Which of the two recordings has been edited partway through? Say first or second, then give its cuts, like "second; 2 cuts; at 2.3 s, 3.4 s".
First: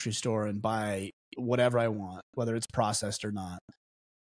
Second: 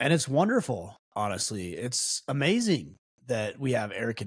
second; 1 cut; at 1.0 s